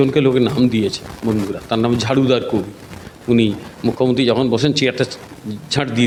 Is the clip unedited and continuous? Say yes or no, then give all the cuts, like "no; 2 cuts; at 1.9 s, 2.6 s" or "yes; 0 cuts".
yes; 0 cuts